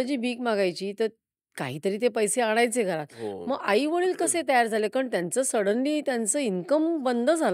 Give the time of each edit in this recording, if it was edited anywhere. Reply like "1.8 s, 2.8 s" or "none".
none